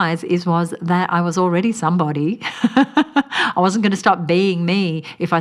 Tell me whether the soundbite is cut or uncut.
uncut